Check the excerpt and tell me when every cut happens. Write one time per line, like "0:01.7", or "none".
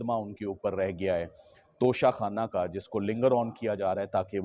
none